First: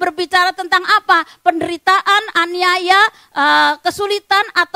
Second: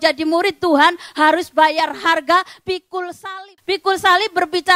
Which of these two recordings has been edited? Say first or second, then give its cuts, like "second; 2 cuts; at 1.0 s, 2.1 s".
second; 1 cut; at 3.3 s